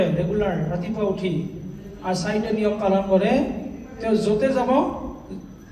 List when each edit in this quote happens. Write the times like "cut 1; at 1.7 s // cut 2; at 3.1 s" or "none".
none